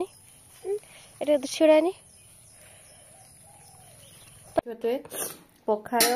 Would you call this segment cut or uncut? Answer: cut